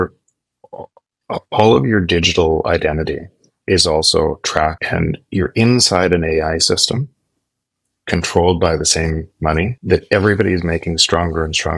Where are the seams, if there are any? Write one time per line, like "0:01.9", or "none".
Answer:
0:04.8